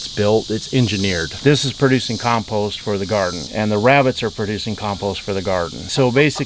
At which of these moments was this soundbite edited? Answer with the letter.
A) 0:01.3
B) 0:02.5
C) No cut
A